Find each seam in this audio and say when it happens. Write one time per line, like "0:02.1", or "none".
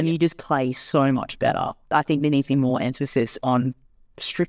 0:01.9